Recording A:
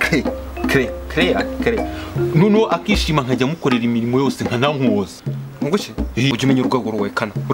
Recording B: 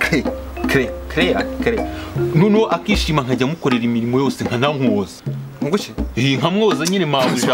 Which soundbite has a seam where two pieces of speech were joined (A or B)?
A